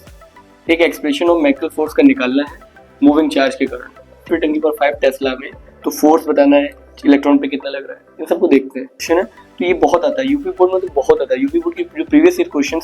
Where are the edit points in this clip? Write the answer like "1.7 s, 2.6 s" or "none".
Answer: 4.3 s, 9.0 s